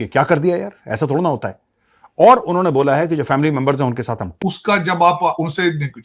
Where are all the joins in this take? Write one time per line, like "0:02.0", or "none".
0:04.3